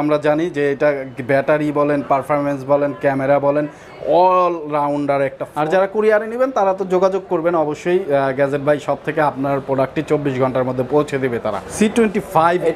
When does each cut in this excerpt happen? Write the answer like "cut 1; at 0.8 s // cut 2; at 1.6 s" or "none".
cut 1; at 5.5 s // cut 2; at 11.6 s